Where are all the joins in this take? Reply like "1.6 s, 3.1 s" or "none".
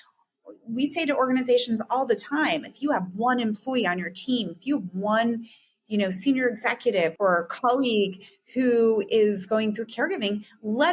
7.1 s